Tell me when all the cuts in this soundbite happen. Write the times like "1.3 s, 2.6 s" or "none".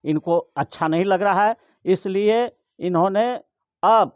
none